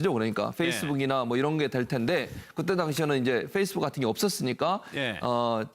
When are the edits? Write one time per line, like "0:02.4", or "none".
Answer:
0:03.0

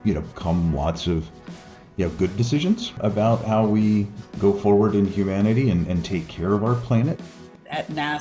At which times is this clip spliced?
0:03.0
0:04.2
0:07.2

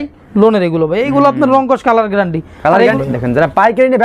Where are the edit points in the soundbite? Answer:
0:03.0

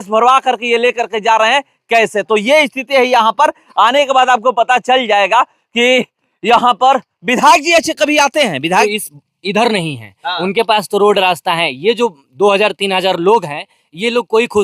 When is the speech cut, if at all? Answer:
0:08.8

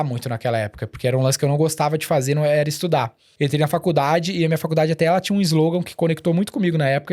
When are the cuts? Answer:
0:03.2

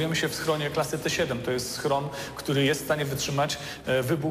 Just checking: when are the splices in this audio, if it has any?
none

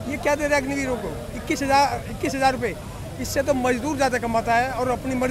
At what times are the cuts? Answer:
none

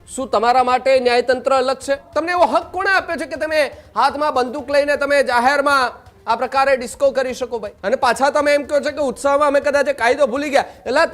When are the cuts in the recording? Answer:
0:02.1
0:07.7

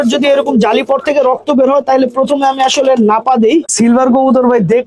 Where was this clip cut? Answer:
0:03.7

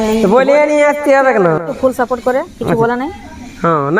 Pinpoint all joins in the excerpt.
0:01.7

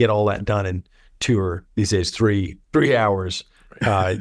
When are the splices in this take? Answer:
0:01.6
0:02.6

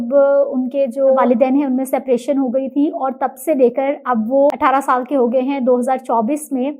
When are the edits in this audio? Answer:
0:01.2
0:04.5

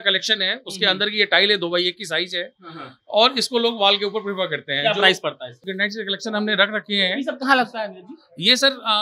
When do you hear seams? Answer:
0:05.7

